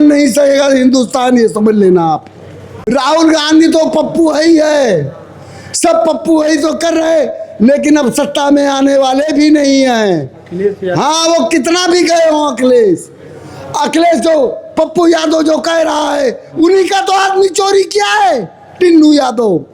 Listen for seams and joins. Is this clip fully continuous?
no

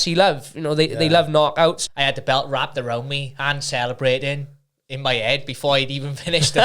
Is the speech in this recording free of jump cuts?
no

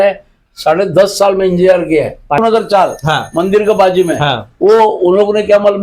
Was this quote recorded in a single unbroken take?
no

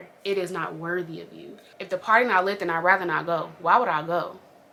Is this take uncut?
yes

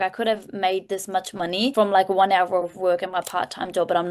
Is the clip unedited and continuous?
no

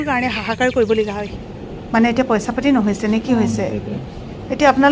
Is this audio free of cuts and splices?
no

